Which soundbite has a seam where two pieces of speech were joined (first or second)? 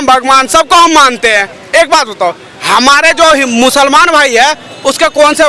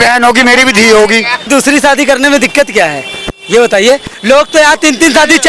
second